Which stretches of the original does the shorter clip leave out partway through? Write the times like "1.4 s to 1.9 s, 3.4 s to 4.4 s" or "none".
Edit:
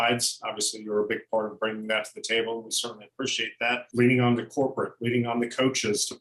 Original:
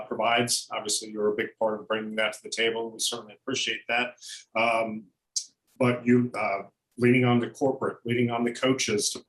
4.1 s to 6.9 s